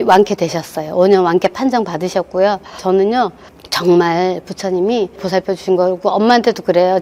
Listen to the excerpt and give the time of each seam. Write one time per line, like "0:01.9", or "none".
0:02.7

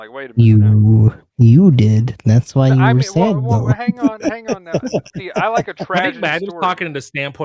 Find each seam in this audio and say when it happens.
none

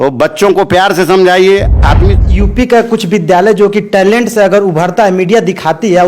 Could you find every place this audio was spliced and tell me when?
0:02.1

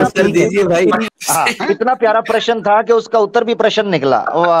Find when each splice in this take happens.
0:01.1

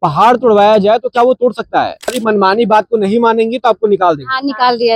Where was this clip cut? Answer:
0:02.2

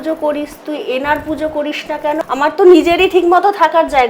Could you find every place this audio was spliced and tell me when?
0:02.2

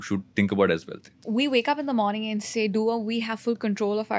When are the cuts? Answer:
0:01.1

